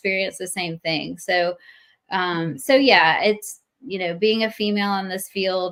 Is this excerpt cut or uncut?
uncut